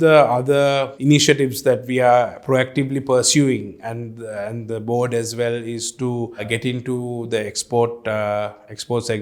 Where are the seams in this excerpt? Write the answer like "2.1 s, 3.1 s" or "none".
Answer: 0.9 s